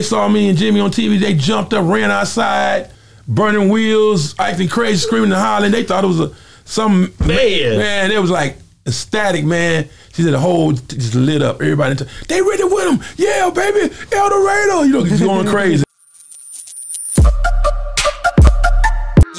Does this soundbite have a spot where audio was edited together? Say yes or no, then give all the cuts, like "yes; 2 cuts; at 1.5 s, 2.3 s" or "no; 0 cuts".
yes; 1 cut; at 15.8 s